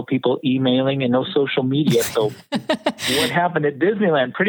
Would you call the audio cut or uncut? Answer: uncut